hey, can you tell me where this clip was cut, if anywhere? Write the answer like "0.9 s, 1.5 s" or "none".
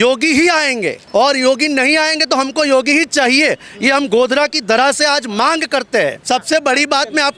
1.0 s, 6.2 s